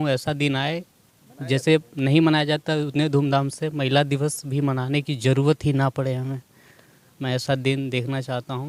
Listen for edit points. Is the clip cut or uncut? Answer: uncut